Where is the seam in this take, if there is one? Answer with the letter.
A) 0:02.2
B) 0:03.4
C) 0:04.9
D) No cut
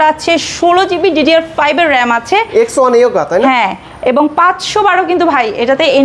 D